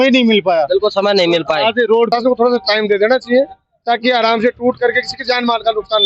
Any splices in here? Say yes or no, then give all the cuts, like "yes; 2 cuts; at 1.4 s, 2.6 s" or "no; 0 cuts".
yes; 1 cut; at 2.1 s